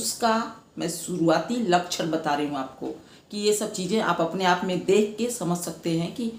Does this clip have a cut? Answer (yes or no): no